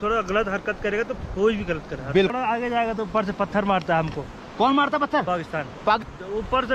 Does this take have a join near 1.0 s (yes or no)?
no